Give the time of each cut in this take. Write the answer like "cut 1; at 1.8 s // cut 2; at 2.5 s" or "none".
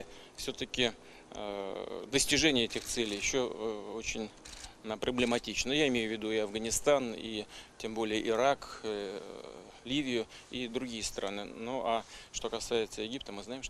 cut 1; at 8.2 s